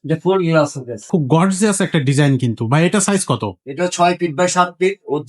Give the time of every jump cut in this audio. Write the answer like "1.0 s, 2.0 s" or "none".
1.0 s